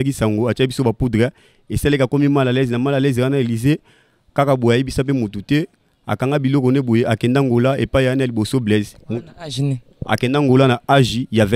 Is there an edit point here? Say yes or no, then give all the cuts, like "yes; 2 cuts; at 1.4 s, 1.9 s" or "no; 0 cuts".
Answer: no; 0 cuts